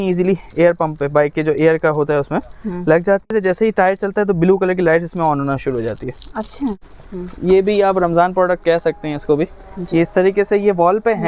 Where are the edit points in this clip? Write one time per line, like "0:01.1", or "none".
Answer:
0:03.3
0:06.8